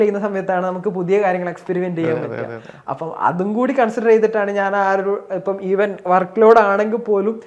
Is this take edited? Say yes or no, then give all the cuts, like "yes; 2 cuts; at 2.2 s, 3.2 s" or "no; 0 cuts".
no; 0 cuts